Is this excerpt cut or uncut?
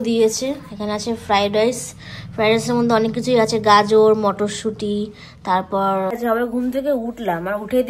cut